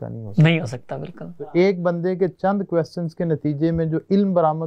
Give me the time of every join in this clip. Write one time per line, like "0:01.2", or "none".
0:01.5

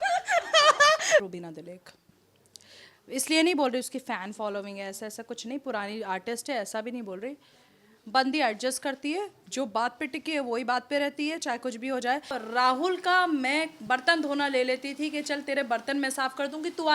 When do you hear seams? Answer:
0:01.3
0:12.4

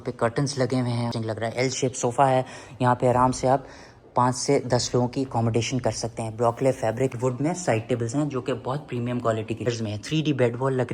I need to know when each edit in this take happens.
0:01.1
0:07.1
0:09.7

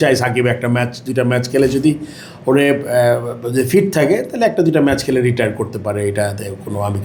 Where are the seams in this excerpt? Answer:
none

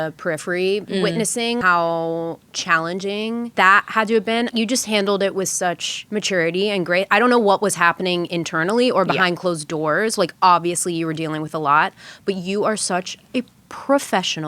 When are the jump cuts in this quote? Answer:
0:01.4
0:03.5
0:04.5
0:05.9

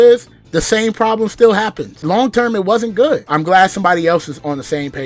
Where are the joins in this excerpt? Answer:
0:01.9
0:03.2

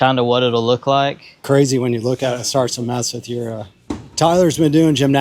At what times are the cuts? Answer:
0:01.3
0:03.8

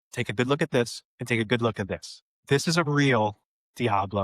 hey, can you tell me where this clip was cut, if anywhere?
none

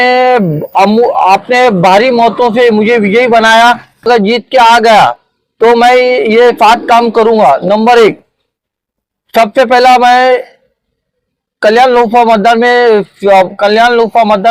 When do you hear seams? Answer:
0:04.1

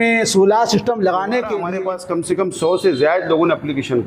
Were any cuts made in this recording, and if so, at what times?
0:01.6

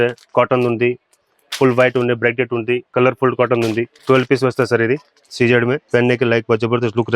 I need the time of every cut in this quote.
0:02.9
0:03.9
0:05.2
0:05.8

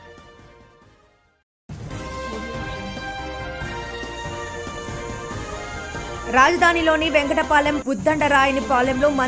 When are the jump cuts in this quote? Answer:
0:01.5
0:05.5

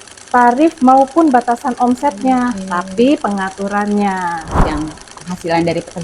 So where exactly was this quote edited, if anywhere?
0:04.6

